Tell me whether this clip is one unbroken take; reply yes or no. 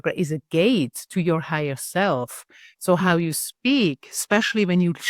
yes